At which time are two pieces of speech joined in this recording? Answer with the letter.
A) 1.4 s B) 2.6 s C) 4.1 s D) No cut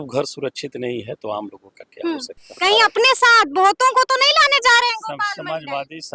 B